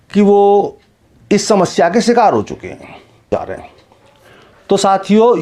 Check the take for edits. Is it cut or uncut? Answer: cut